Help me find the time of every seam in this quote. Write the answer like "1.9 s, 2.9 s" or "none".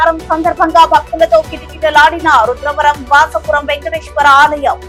none